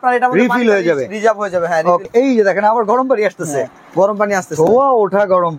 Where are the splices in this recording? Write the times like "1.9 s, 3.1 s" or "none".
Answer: 2.1 s